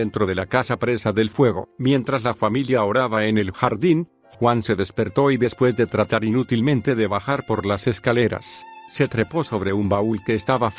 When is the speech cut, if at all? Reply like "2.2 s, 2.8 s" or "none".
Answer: 1.1 s